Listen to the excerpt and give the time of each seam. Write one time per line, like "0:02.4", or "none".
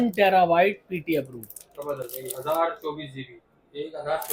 none

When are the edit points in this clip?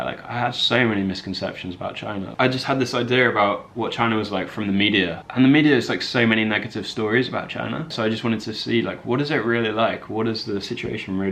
0:02.3
0:07.9

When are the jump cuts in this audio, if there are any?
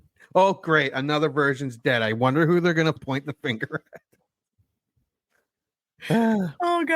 0:03.0

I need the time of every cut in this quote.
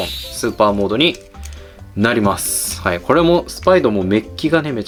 none

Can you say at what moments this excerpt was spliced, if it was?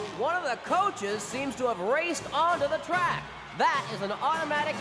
none

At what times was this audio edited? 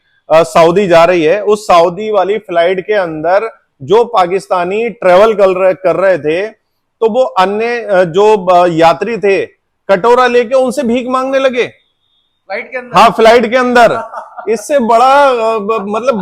none

